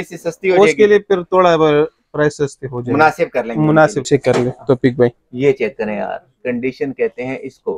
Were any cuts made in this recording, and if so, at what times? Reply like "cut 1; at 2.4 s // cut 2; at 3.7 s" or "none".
cut 1; at 4.1 s